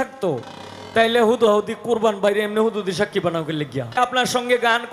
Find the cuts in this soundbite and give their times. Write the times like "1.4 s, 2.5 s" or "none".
4.0 s